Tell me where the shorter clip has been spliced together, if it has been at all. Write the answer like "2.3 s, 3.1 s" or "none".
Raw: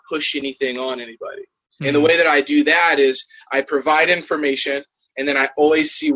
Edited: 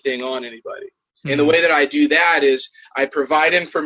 none

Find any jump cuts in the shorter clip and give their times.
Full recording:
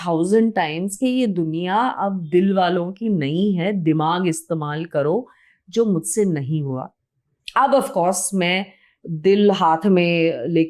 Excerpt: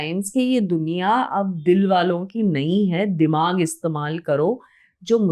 none

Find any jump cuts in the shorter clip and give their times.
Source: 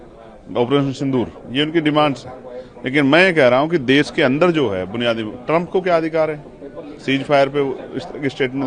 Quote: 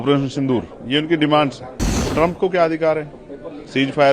2.0 s

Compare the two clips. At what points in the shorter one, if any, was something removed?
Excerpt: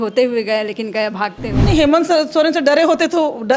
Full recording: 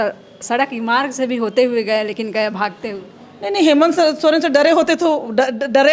1.5 s

